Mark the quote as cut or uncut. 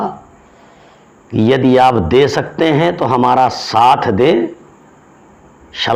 uncut